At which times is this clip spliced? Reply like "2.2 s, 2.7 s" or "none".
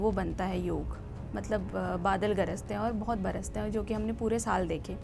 none